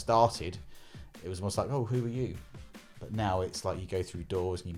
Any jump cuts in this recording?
no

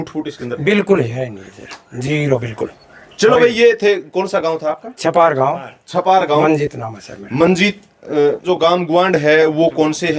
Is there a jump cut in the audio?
yes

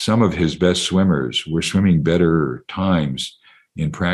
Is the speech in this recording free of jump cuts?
yes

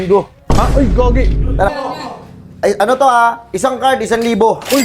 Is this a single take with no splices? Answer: no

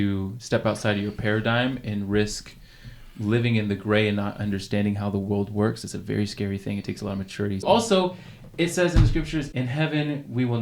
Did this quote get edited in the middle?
yes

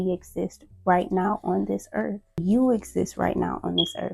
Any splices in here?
yes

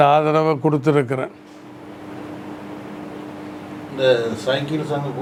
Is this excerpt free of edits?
yes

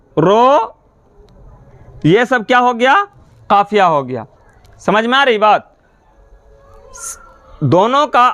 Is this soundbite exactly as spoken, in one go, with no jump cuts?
yes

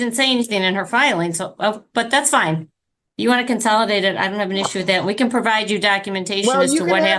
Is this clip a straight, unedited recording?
yes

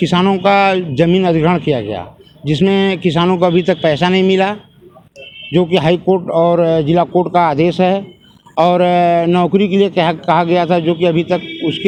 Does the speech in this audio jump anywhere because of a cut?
no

